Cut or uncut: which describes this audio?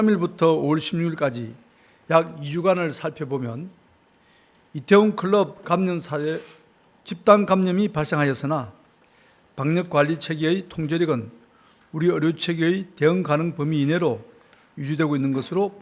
uncut